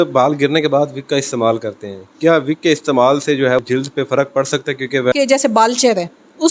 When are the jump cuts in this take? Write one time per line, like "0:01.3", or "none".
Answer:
0:03.6
0:05.1